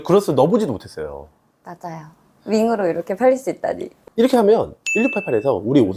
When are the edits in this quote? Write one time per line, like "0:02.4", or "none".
0:03.9